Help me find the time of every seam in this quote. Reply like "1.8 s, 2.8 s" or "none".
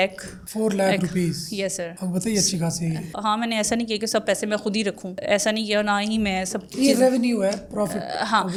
none